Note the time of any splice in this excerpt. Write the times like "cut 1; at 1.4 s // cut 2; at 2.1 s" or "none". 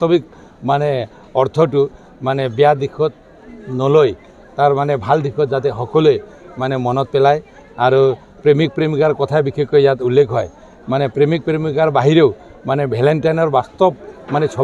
none